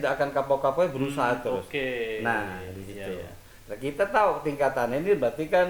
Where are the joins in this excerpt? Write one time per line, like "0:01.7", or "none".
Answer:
none

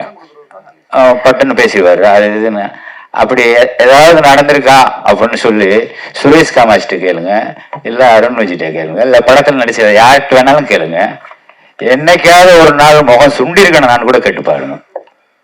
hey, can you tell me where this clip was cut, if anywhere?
none

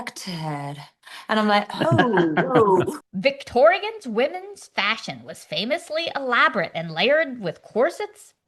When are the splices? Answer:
0:03.0

